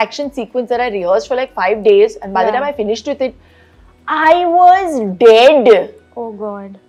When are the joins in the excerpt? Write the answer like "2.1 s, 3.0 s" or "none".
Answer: none